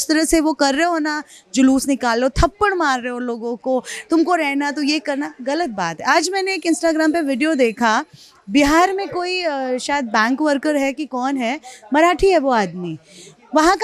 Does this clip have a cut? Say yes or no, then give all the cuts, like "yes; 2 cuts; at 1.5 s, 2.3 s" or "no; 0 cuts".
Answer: no; 0 cuts